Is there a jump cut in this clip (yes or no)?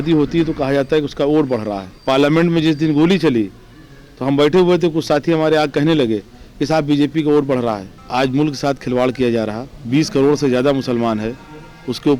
yes